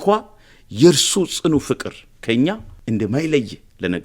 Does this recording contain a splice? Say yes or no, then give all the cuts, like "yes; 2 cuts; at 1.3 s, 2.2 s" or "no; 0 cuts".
yes; 1 cut; at 2.7 s